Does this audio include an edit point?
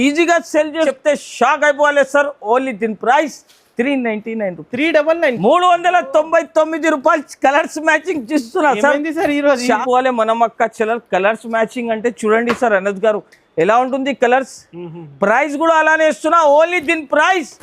yes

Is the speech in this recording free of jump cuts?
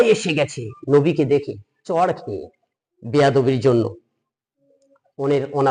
yes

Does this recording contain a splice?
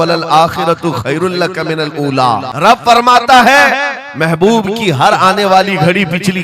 yes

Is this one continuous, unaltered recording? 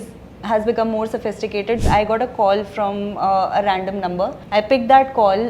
no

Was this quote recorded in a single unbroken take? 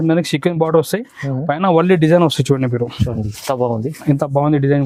yes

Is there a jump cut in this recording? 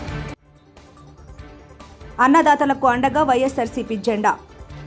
no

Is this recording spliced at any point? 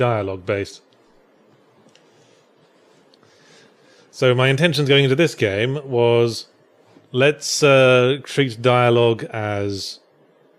yes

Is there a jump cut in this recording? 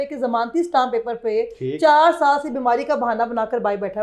no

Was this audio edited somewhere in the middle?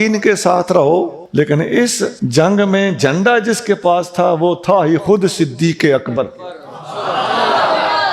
yes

